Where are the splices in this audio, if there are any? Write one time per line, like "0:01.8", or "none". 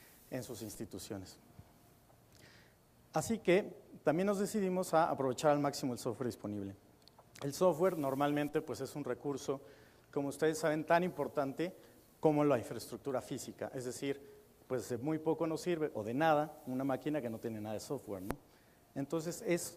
0:14.5